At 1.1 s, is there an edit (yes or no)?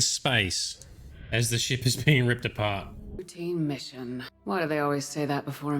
no